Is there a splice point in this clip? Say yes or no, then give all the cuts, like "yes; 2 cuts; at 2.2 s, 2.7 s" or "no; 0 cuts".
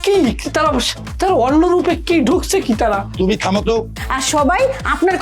yes; 1 cut; at 3.9 s